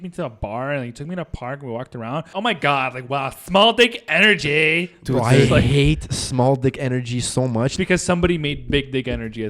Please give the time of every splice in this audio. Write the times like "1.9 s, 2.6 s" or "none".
2.3 s, 7.7 s